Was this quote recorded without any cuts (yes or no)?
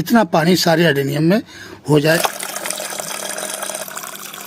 no